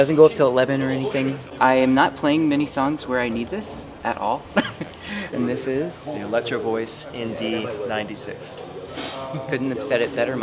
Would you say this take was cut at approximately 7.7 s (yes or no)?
no